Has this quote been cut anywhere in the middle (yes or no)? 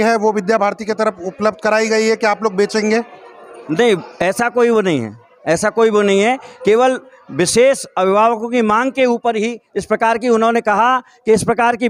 no